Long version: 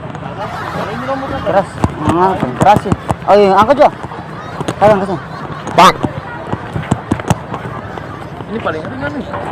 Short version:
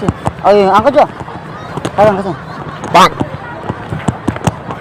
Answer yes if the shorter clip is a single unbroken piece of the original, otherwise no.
yes